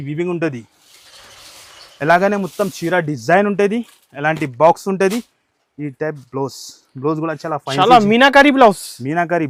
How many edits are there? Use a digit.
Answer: 0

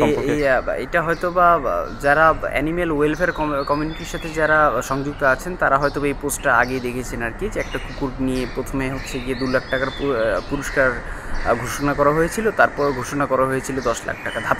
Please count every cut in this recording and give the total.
0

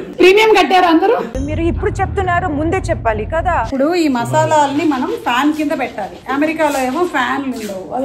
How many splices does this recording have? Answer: 1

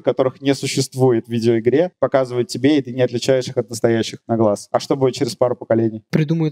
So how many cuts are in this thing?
0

